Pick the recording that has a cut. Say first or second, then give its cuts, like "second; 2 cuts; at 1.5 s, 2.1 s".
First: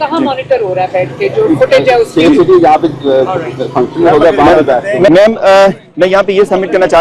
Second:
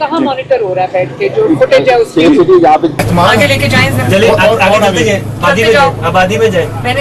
second; 1 cut; at 3.0 s